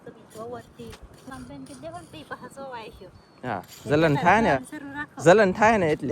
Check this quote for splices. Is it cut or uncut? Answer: cut